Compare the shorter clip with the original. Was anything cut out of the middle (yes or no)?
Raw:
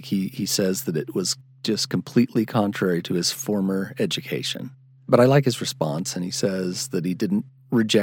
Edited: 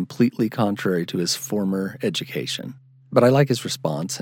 no